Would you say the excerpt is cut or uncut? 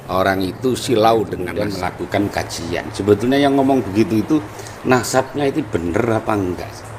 cut